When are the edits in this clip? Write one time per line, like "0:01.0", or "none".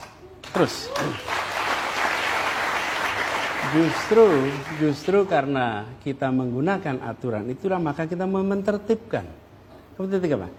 none